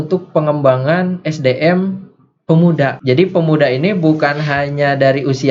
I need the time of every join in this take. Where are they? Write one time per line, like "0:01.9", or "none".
0:03.0